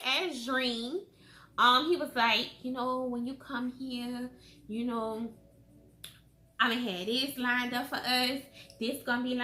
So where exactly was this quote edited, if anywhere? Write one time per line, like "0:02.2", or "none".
none